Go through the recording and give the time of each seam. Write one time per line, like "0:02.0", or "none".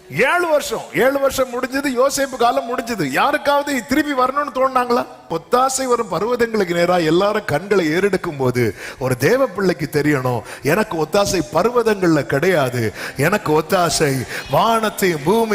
0:05.3